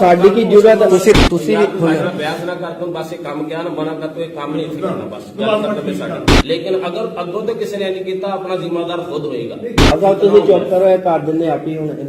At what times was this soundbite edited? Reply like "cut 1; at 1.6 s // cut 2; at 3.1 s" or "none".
cut 1; at 1.2 s // cut 2; at 6.3 s // cut 3; at 9.8 s